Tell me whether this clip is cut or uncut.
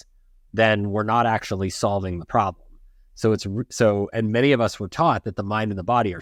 uncut